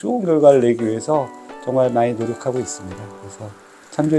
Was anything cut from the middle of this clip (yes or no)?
no